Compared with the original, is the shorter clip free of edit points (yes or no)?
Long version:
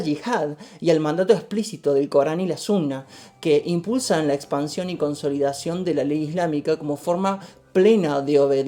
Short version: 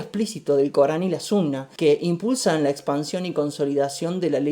no